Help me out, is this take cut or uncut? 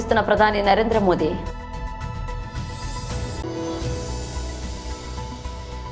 uncut